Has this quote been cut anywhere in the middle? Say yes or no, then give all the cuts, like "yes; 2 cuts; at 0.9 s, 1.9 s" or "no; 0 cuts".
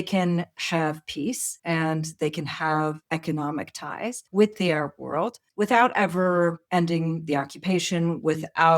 yes; 5 cuts; at 1.5 s, 3.0 s, 4.2 s, 5.4 s, 6.6 s